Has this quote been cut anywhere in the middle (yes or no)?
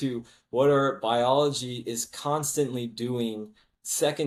no